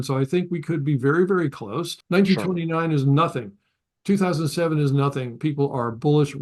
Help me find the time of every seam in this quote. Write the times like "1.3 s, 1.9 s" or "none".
1.9 s